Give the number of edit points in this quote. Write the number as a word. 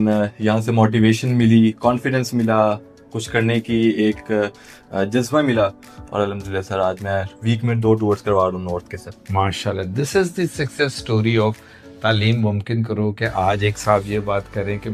zero